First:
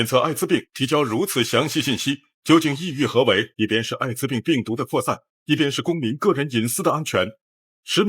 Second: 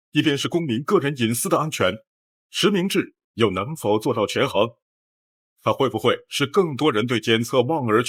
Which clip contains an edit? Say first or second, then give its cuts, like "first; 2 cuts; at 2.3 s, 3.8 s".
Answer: first; 1 cut; at 3.5 s